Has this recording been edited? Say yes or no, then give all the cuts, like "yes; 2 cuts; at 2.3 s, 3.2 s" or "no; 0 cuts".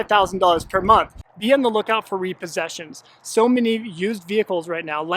yes; 1 cut; at 1.2 s